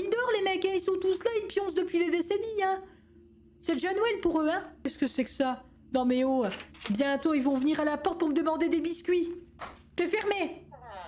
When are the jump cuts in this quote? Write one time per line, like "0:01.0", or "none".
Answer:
0:04.9